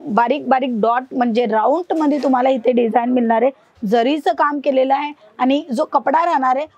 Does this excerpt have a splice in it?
no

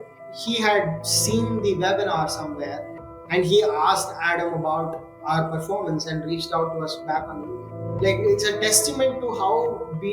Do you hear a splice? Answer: yes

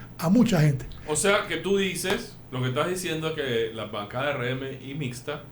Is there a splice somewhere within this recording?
no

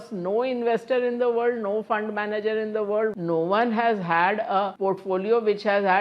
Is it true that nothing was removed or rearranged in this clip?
no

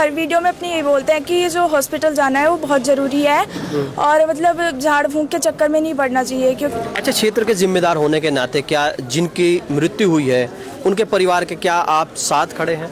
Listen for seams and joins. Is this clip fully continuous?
no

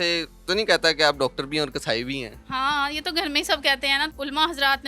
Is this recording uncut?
no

